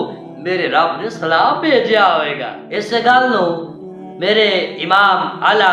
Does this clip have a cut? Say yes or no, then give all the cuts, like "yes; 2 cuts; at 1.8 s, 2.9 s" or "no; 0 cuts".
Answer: no; 0 cuts